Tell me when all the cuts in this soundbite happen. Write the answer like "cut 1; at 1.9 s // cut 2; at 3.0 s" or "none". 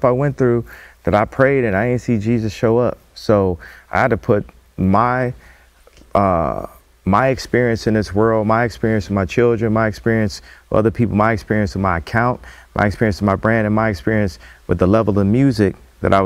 none